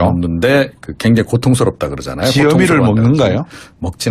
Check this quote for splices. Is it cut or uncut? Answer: cut